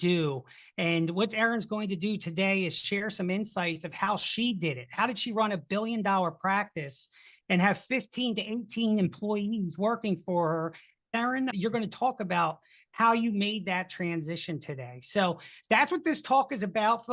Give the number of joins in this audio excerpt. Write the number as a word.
one